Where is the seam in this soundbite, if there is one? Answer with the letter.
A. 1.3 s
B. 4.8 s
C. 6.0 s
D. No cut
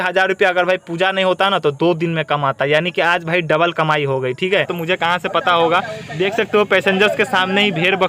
B